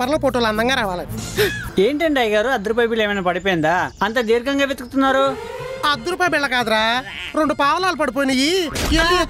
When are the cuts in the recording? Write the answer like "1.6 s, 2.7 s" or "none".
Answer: 1.6 s